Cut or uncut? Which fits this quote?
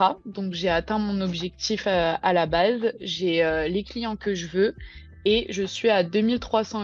uncut